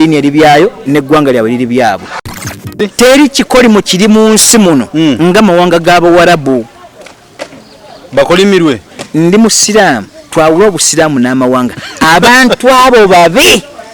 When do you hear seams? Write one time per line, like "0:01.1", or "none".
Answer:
0:02.3